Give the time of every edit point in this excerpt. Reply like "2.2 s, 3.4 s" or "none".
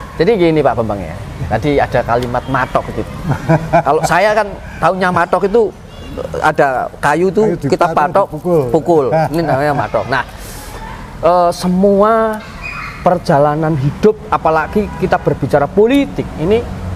none